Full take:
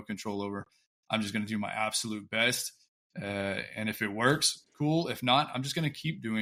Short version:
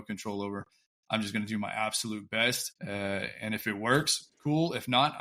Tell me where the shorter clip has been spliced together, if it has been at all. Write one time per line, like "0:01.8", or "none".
0:02.7